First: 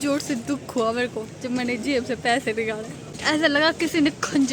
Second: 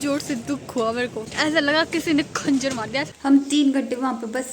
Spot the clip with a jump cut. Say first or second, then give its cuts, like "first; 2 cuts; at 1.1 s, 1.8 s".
second; 2 cuts; at 1.2 s, 3.1 s